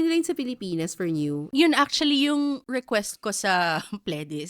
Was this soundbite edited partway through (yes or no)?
yes